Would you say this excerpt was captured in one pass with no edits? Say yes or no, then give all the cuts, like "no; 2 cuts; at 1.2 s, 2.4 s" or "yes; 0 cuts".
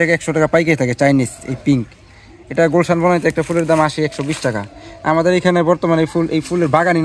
yes; 0 cuts